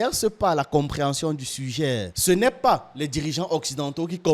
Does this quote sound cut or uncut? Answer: cut